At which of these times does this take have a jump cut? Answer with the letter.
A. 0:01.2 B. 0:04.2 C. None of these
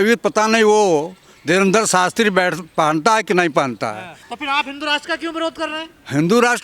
B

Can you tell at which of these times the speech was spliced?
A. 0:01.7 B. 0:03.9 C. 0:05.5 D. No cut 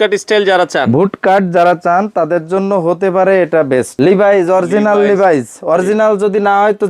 B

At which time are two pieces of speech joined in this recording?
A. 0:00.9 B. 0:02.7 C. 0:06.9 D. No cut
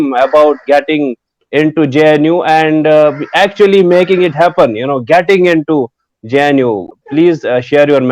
C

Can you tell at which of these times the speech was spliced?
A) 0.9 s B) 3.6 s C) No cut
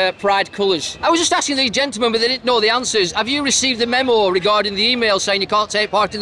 A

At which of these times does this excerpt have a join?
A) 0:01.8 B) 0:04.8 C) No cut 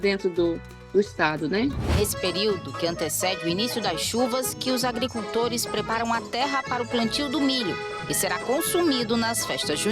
A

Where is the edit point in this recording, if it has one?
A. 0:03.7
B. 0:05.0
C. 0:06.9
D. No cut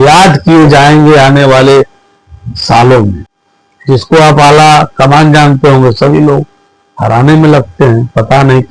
A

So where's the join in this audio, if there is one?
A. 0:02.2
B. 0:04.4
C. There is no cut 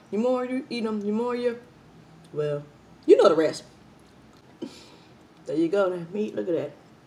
B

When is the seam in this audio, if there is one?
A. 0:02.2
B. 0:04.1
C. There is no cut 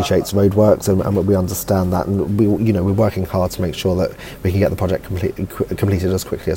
C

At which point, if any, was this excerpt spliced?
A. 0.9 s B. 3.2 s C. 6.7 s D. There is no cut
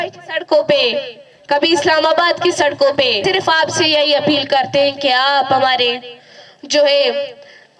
B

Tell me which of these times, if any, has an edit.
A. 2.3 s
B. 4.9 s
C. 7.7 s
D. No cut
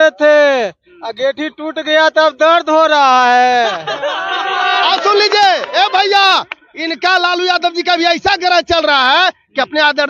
D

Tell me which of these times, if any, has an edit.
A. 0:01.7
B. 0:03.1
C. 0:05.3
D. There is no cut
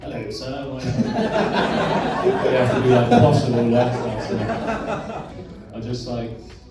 C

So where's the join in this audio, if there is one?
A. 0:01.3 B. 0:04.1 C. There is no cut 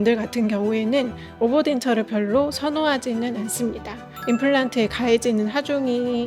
B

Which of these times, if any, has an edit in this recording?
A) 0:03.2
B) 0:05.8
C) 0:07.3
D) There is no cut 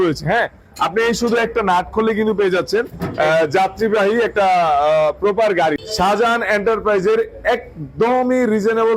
B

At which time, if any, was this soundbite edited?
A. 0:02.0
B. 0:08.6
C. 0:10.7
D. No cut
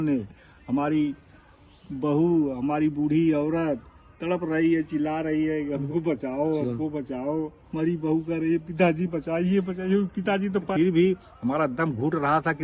C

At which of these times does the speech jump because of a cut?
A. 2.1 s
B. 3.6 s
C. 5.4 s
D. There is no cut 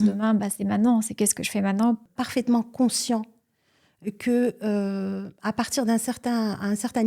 A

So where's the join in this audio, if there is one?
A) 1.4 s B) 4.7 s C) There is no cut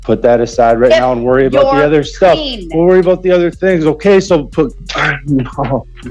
B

